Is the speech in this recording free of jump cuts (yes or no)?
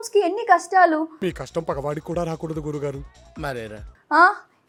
yes